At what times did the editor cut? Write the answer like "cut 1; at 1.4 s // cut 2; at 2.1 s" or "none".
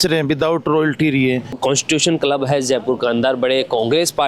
cut 1; at 1.6 s